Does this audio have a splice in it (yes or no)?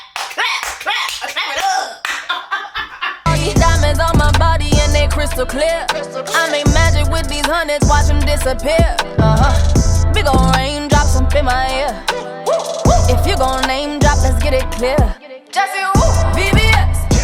yes